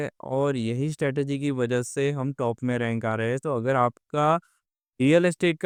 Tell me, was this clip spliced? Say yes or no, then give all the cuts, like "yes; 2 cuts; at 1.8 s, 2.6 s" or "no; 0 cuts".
no; 0 cuts